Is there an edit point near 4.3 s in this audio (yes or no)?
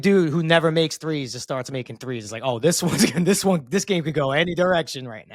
no